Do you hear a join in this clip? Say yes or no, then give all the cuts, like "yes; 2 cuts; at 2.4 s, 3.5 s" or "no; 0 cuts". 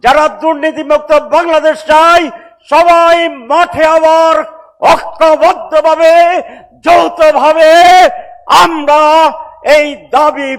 no; 0 cuts